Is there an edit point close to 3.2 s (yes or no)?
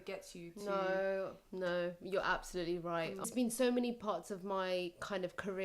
yes